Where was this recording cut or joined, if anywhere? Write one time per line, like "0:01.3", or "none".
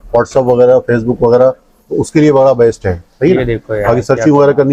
none

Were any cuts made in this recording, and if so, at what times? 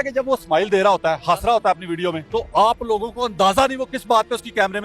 0:02.2

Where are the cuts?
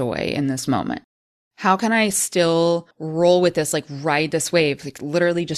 0:01.2
0:03.0

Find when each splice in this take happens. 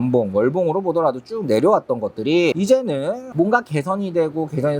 0:03.2

